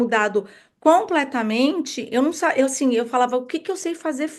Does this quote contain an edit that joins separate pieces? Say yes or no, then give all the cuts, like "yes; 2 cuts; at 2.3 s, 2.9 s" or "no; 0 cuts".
no; 0 cuts